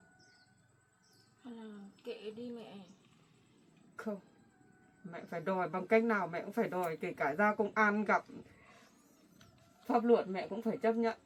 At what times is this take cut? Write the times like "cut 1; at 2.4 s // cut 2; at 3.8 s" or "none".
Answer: none